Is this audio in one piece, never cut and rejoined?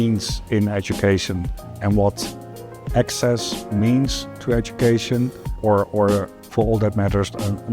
no; 3 cuts; at 2.8 s, 5.4 s, 6.3 s

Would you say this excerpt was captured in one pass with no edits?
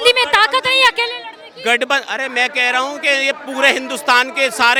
yes; 0 cuts

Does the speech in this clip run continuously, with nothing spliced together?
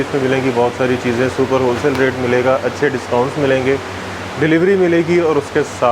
yes; 0 cuts

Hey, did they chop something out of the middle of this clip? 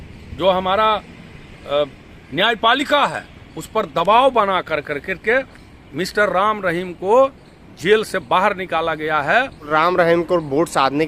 yes; 1 cut; at 9.7 s

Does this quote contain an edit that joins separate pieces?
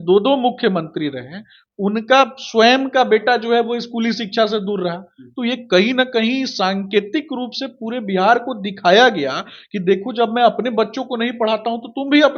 no; 0 cuts

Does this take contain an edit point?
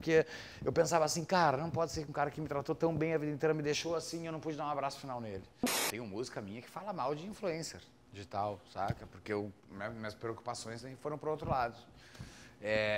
yes; 1 cut; at 5.8 s

